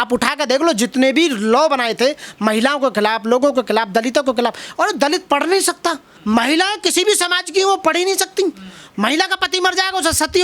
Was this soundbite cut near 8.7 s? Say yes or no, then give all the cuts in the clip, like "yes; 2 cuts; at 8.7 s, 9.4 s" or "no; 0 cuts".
no; 1 cut; at 6.1 s